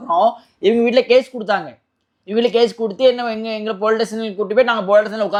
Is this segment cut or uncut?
uncut